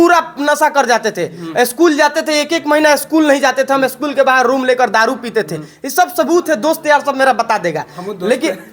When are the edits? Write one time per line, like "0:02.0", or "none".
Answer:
none